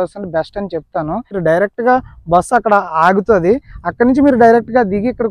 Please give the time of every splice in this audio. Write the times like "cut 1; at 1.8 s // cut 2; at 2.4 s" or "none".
cut 1; at 1.4 s